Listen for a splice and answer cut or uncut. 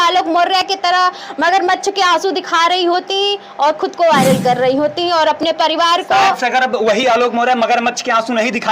uncut